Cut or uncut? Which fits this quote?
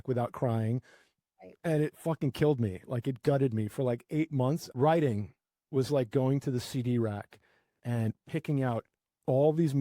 cut